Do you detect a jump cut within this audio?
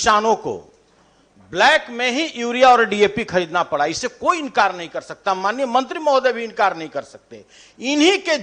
no; 0 cuts

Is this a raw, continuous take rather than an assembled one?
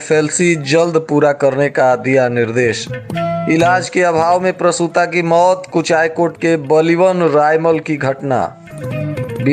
yes; 0 cuts

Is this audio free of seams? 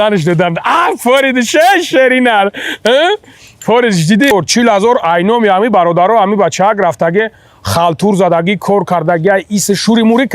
no; 1 cut; at 4.3 s

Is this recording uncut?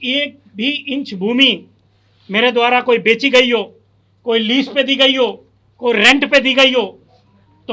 yes; 0 cuts

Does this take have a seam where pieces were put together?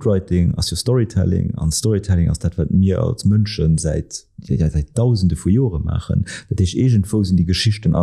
no; 0 cuts

